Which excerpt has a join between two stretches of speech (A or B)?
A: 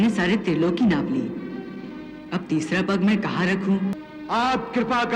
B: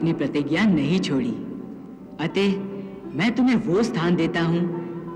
A